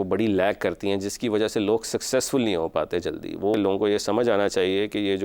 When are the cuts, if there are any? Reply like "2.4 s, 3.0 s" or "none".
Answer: 3.5 s